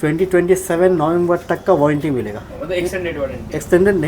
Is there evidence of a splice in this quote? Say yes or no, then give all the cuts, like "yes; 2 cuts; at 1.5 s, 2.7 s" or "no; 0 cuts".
no; 0 cuts